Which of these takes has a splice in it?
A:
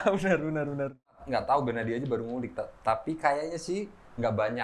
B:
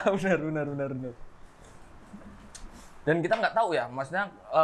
A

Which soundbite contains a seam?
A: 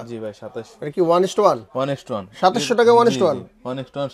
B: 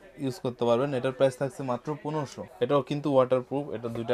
B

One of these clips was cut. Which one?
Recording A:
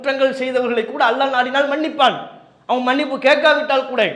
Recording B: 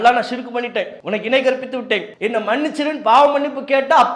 B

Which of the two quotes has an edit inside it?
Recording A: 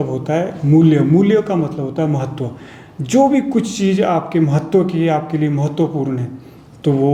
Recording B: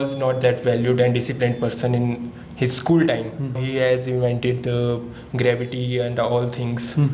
B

